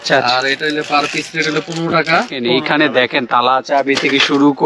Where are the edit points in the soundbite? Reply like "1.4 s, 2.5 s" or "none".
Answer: 2.4 s